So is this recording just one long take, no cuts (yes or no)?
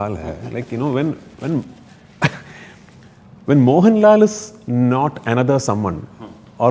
yes